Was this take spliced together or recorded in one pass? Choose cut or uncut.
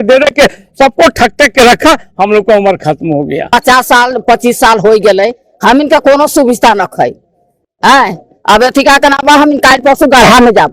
cut